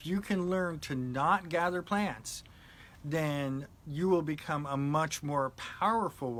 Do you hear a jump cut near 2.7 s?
no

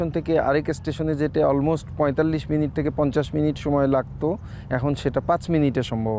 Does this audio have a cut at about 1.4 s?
no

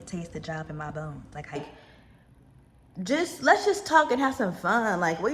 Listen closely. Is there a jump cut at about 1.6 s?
yes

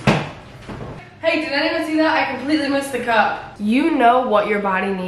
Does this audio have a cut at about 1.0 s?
yes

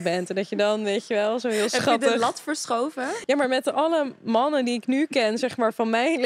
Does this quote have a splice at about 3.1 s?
yes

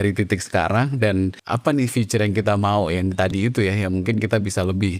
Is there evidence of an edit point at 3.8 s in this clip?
no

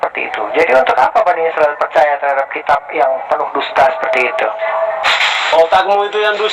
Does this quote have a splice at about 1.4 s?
no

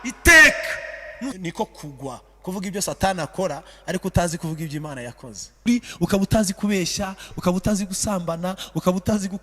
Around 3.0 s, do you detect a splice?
no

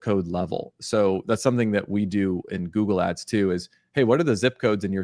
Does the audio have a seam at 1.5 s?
no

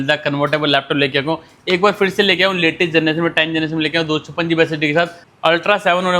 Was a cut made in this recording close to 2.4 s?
no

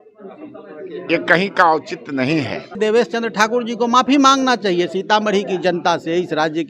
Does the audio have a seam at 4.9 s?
no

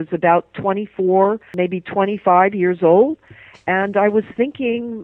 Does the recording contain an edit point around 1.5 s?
yes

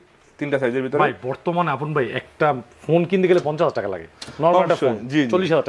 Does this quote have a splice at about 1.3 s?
no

